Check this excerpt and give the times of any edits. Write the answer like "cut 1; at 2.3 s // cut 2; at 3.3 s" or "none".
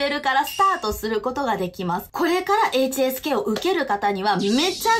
cut 1; at 2.1 s